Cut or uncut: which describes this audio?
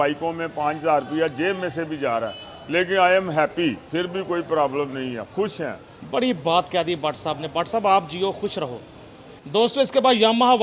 uncut